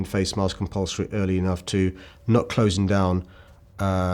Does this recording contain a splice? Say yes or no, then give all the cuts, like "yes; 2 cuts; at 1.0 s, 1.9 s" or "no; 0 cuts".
no; 0 cuts